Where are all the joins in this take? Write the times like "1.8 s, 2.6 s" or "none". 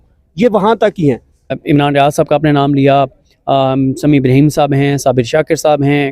1.6 s